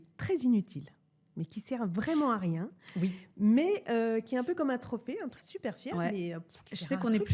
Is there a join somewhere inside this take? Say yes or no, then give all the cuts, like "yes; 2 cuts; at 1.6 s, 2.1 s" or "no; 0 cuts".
yes; 1 cut; at 5.3 s